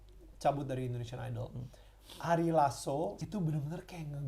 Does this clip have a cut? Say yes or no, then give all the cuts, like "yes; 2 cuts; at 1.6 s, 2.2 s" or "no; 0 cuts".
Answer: yes; 1 cut; at 3.2 s